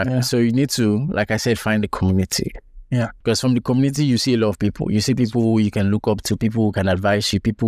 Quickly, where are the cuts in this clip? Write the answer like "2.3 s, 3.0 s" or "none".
3.2 s